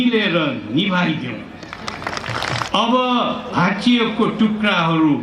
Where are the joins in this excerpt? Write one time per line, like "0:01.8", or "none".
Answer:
0:02.7